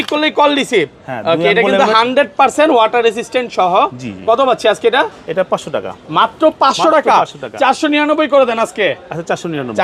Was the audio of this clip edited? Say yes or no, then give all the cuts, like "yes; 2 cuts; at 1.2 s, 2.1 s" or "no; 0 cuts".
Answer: no; 0 cuts